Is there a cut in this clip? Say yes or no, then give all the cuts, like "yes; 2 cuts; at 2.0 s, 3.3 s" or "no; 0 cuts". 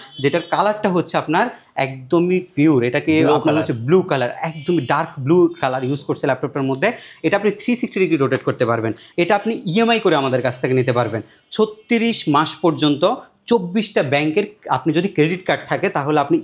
yes; 1 cut; at 9.0 s